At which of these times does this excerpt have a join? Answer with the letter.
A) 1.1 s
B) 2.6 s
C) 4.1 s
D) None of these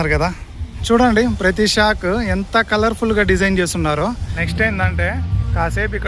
D